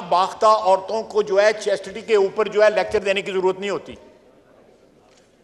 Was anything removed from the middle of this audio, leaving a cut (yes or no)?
no